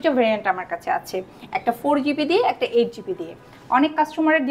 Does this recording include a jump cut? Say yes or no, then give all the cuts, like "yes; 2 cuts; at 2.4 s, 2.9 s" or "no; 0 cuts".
no; 0 cuts